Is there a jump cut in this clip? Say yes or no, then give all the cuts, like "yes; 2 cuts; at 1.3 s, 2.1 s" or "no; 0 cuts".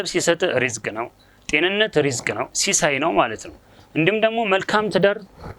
no; 0 cuts